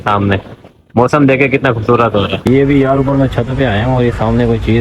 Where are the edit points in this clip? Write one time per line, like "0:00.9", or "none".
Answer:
0:02.4